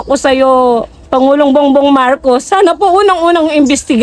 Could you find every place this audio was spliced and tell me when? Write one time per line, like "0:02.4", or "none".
none